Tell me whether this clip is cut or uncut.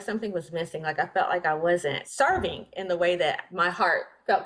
cut